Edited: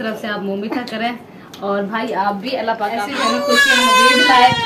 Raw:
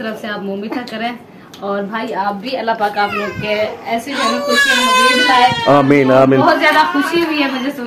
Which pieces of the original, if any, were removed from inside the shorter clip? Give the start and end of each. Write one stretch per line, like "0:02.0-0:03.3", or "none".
0:03.0-0:04.0